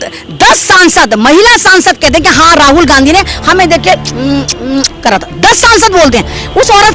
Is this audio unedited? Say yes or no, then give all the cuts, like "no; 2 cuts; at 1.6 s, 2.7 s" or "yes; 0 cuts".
yes; 0 cuts